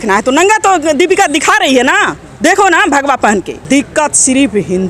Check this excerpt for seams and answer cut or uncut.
cut